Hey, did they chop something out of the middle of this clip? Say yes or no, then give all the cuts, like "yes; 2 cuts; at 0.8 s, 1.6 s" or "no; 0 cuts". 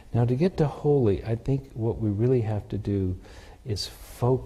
no; 0 cuts